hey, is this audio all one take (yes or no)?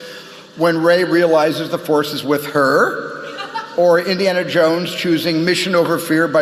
yes